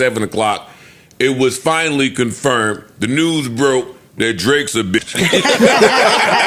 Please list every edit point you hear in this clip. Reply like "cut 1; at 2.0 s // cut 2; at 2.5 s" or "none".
cut 1; at 5.1 s